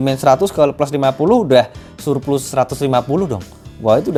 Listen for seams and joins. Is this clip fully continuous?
yes; 0 cuts

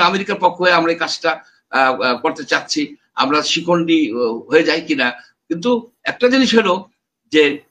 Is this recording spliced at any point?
no; 0 cuts

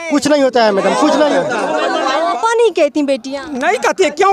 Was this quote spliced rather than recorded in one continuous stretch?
yes; 1 cut; at 2.2 s

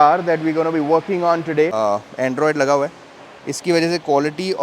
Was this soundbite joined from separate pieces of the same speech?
yes; 1 cut; at 1.7 s

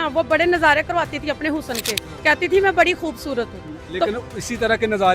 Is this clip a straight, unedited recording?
yes; 0 cuts

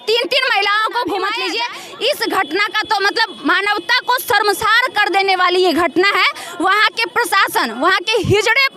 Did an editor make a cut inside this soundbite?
yes; 1 cut; at 1.4 s

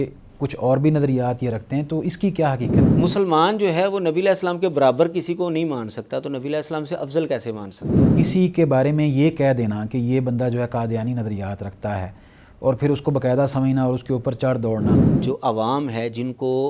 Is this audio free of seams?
no; 3 cuts; at 2.9 s, 8.1 s, 15.1 s

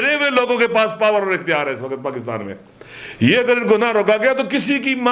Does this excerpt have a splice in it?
no; 0 cuts

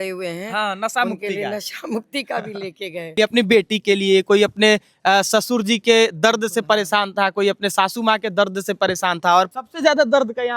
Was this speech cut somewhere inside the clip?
yes; 2 cuts; at 3.1 s, 9.5 s

